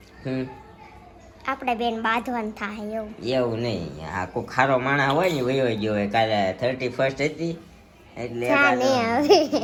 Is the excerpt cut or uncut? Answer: uncut